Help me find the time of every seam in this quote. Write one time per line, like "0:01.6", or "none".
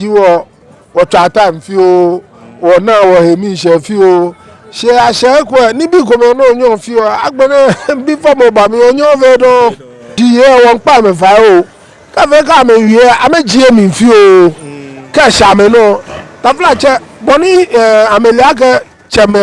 0:10.2